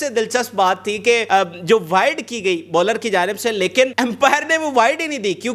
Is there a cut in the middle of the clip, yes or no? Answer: yes